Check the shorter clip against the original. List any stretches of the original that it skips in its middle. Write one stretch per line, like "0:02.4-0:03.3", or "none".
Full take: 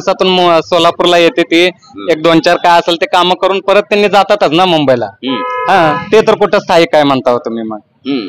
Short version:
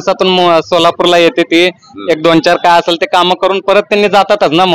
none